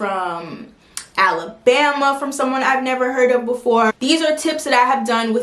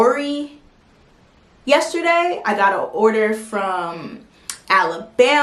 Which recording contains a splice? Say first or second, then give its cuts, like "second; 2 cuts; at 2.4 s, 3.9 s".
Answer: first; 1 cut; at 3.9 s